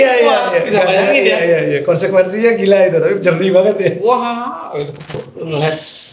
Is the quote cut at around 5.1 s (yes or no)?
yes